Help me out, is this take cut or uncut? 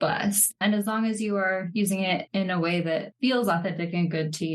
cut